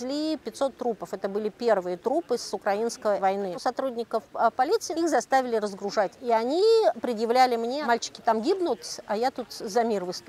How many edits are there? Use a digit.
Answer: 4